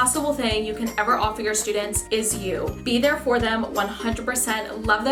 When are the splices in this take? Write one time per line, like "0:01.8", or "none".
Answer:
none

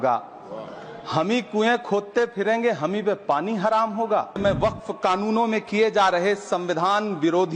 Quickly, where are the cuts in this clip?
0:04.4

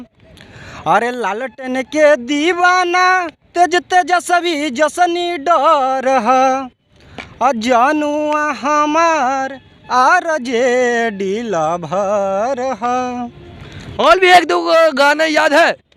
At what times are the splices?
none

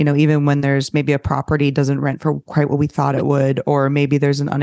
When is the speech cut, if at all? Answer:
none

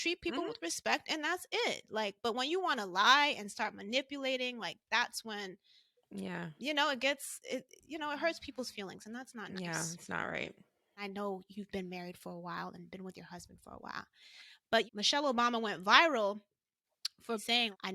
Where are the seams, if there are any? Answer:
none

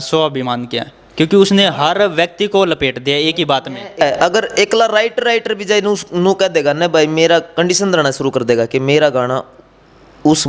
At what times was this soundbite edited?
0:04.0

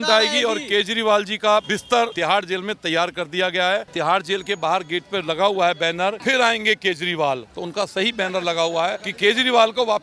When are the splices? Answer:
0:01.8
0:03.9
0:06.2
0:09.1

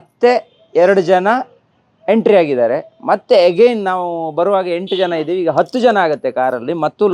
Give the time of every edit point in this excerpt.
none

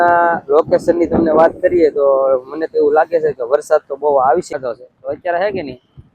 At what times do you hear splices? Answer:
0:04.5

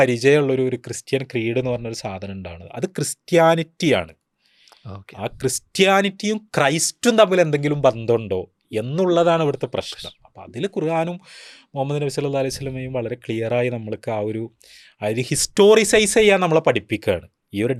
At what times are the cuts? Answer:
none

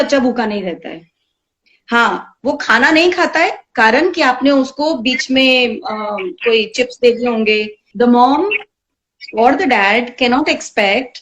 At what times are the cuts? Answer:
0:07.8

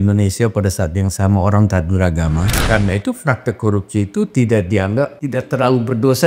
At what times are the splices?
0:02.6
0:05.2

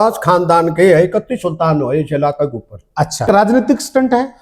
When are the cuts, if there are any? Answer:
0:03.3

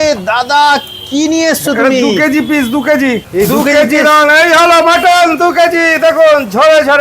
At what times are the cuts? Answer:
0:03.3

